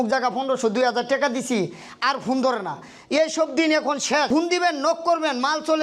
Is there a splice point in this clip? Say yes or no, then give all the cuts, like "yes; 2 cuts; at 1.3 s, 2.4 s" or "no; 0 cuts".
yes; 1 cut; at 4.3 s